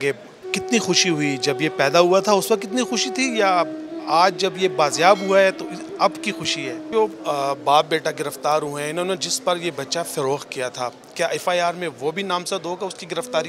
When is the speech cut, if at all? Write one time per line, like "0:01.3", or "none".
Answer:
0:06.9